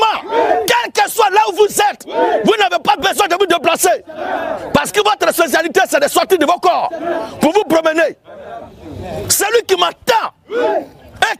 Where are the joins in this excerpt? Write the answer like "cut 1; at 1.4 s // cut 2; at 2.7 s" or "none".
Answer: none